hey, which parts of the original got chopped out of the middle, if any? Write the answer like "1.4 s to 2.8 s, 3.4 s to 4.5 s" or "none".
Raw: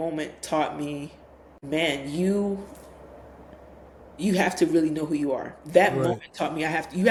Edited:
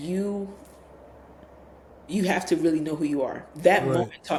none